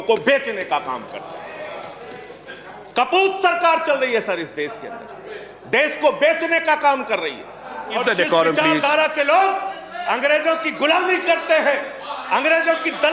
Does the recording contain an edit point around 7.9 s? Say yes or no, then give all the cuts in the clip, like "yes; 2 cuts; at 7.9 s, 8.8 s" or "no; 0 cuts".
yes; 1 cut; at 7.9 s